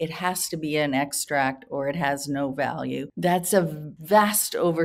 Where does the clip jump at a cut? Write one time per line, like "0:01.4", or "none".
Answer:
0:03.1
0:03.9